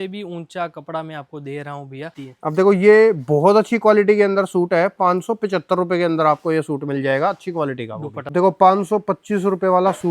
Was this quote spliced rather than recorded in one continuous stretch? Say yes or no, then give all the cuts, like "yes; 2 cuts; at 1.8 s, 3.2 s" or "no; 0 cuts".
yes; 2 cuts; at 2.2 s, 8.3 s